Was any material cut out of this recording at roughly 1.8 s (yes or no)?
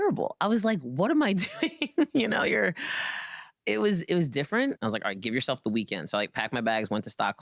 no